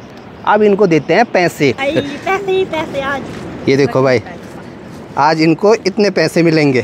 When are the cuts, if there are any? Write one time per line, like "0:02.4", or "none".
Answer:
0:01.8